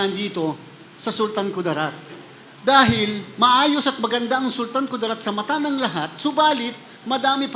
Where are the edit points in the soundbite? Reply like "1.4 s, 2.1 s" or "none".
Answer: none